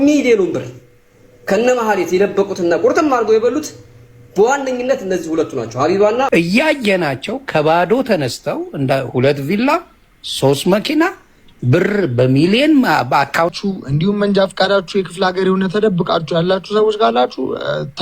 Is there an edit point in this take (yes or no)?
yes